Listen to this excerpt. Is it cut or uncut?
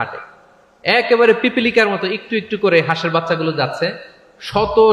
uncut